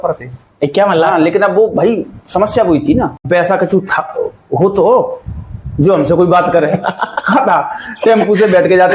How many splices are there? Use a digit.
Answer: 1